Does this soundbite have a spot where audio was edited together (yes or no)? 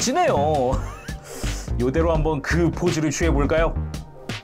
yes